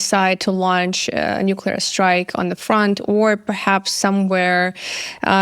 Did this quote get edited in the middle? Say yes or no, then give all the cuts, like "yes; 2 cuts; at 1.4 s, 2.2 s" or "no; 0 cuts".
no; 0 cuts